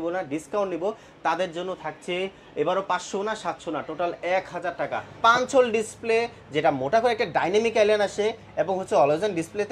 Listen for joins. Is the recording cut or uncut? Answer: cut